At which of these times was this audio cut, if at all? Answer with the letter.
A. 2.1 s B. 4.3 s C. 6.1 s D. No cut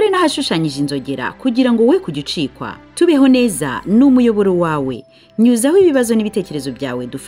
D